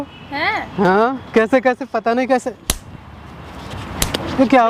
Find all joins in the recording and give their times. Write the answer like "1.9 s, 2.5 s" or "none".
none